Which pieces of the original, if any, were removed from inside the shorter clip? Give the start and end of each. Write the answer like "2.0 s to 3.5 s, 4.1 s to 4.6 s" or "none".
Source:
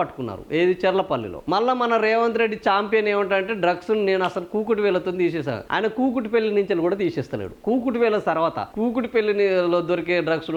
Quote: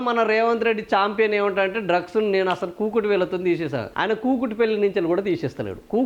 none